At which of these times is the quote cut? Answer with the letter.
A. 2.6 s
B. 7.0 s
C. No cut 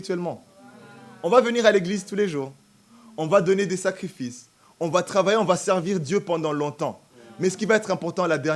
C